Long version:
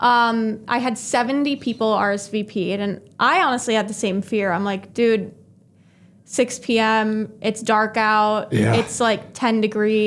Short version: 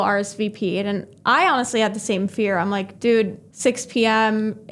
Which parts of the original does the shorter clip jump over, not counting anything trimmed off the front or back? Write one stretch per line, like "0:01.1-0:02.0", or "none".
0:05.4-0:06.2